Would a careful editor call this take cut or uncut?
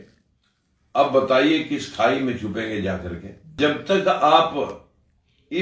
cut